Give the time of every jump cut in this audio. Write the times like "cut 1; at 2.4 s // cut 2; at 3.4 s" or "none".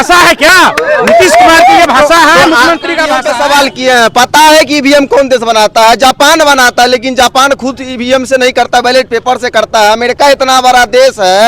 cut 1; at 3.2 s